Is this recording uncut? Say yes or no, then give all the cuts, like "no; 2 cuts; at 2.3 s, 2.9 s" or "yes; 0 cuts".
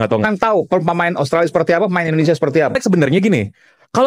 no; 1 cut; at 2.8 s